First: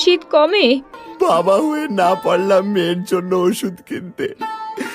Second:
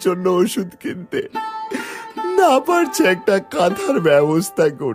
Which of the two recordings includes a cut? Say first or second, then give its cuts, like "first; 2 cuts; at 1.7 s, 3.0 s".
first; 1 cut; at 1.0 s